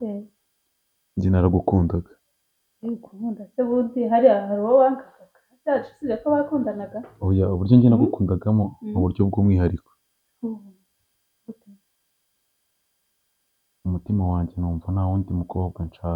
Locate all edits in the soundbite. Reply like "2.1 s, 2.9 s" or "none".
none